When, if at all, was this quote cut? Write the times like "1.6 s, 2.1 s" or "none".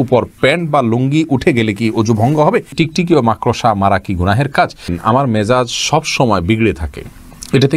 2.7 s, 5.0 s